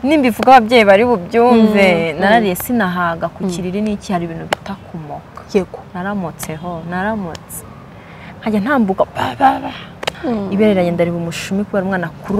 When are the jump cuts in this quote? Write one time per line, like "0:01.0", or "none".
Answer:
0:10.0